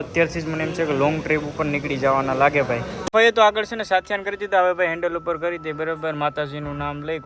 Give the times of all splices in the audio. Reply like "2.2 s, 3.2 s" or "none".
3.1 s